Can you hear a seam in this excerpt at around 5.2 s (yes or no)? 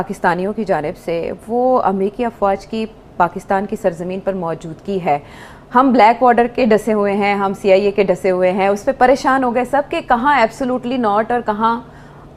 no